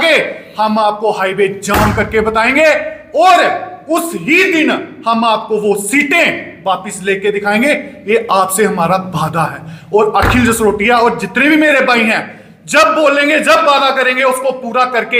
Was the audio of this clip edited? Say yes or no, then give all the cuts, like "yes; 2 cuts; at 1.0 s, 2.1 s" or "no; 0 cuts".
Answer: no; 0 cuts